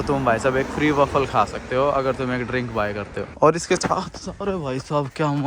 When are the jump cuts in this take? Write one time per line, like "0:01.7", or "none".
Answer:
0:03.2